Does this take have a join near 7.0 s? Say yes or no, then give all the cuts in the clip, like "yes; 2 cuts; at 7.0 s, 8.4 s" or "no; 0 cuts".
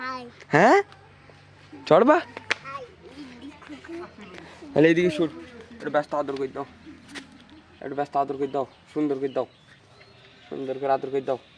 no; 0 cuts